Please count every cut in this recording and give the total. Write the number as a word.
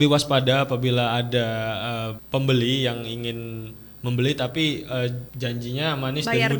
two